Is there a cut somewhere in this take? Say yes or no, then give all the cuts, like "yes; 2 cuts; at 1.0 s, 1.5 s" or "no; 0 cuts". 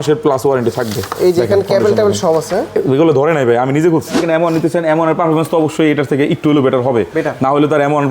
yes; 1 cut; at 4.2 s